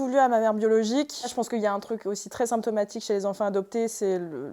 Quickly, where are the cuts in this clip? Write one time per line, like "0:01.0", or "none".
none